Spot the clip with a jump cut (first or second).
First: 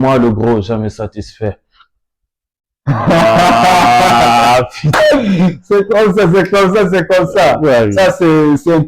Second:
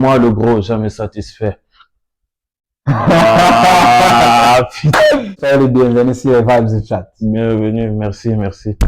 second